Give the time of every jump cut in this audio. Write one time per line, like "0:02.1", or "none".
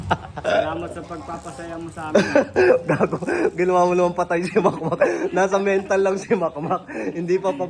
none